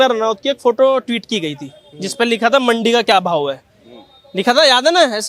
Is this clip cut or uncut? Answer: uncut